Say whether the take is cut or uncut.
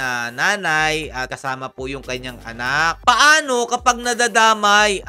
uncut